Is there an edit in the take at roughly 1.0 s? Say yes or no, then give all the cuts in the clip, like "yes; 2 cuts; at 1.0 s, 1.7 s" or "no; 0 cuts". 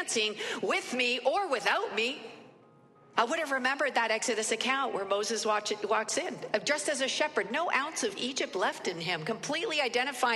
no; 1 cut; at 3.0 s